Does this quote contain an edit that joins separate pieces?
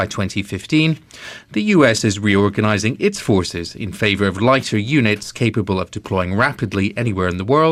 no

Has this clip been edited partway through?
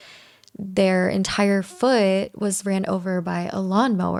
no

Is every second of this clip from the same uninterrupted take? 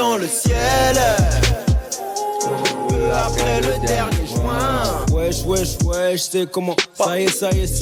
yes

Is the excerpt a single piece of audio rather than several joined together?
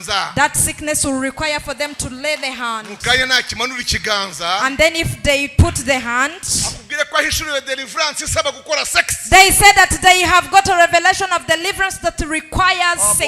yes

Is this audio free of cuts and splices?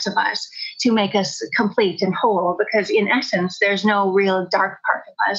yes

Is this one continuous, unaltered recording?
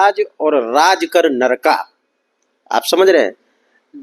yes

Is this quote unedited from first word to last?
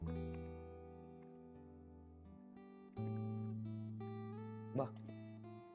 yes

